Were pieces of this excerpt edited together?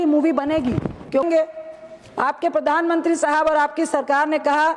yes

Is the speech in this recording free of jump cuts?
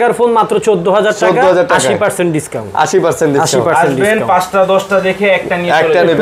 yes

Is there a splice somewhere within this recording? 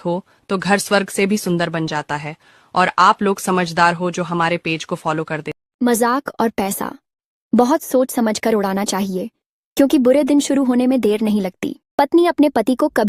yes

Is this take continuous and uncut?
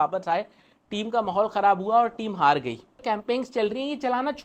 no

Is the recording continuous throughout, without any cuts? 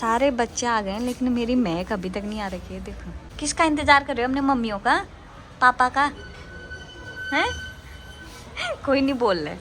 yes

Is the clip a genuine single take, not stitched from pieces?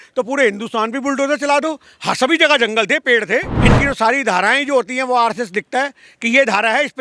no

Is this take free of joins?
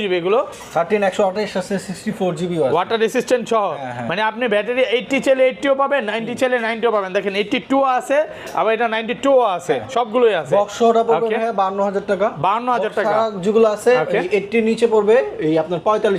yes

